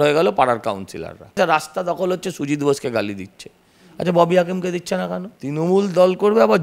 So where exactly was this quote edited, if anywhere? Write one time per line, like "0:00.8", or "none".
0:01.4
0:05.3